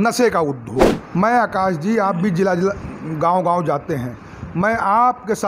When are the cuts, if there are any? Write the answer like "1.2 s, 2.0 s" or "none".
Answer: 0.9 s